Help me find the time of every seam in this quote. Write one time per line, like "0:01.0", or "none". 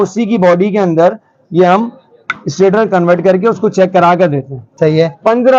0:04.7

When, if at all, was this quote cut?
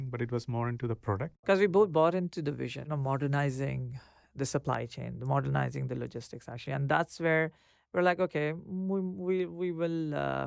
0:01.5
0:02.8

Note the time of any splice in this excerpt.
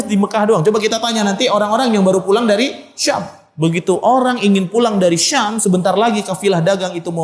none

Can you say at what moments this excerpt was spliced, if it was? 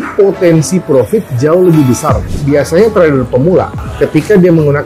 0:02.2
0:03.8

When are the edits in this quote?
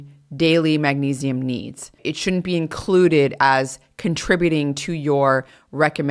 0:01.9

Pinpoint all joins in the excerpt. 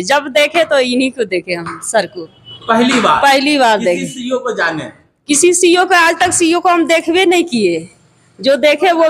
none

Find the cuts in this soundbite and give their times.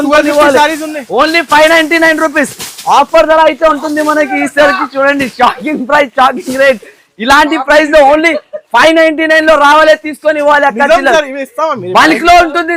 none

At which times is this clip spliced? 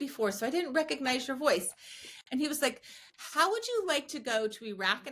none

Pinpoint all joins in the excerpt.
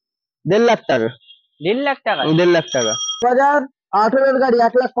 0:03.2

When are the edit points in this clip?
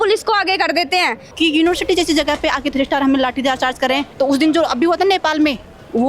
0:01.3
0:04.1

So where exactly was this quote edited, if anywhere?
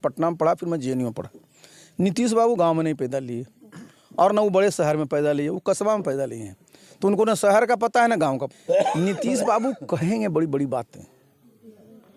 0:08.5

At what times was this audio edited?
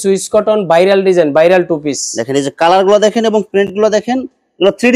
none

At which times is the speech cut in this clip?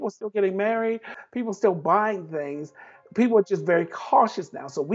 0:01.2

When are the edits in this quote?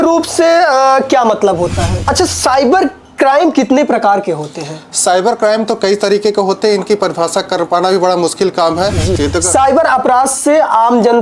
0:01.9
0:09.1

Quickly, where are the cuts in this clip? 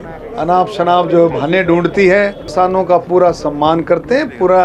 0:02.4

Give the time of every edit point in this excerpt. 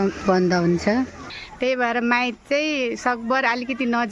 0:01.2

